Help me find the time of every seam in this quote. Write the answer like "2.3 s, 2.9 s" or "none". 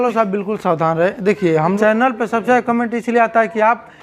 1.8 s